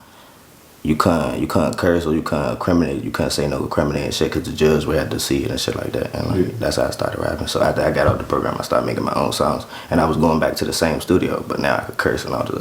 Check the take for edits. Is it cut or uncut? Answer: uncut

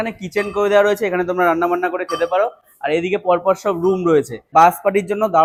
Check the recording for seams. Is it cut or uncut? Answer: uncut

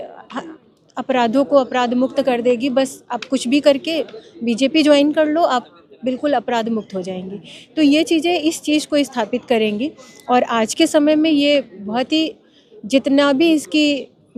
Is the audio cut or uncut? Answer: uncut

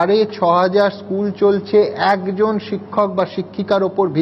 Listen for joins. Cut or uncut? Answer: uncut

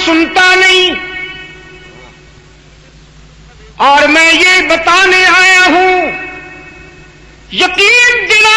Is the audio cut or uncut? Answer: uncut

